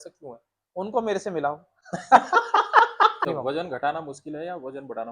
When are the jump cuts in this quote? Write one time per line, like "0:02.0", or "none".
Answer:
0:03.3